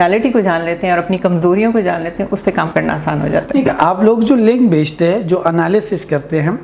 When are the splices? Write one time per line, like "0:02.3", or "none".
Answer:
none